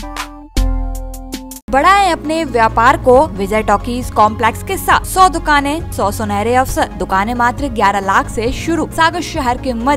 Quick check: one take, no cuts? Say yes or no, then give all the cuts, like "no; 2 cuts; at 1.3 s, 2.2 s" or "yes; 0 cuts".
no; 6 cuts; at 1.7 s, 3.4 s, 5.1 s, 5.9 s, 7.0 s, 8.9 s